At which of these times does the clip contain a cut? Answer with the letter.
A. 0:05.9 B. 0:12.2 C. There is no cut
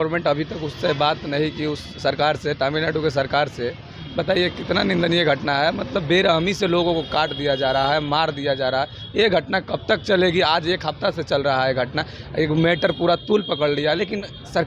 C